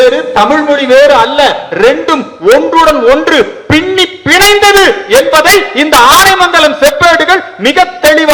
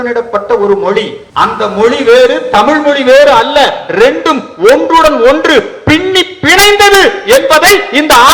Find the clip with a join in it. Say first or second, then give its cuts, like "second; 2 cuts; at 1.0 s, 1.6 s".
second; 1 cut; at 1.2 s